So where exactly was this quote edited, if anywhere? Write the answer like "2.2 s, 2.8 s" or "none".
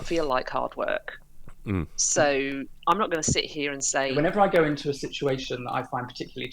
4.1 s